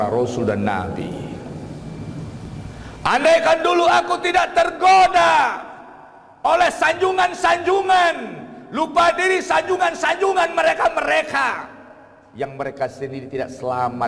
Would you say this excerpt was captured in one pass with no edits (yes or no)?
yes